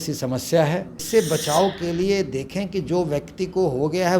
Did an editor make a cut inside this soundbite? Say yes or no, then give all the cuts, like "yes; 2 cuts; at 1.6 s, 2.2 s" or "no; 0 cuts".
yes; 1 cut; at 0.9 s